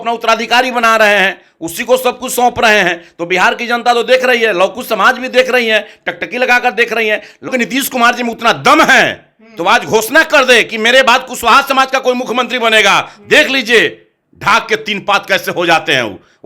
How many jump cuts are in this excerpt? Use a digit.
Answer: 1